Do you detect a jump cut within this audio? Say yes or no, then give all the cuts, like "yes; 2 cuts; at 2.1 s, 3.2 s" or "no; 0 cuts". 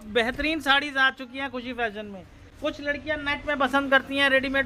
no; 0 cuts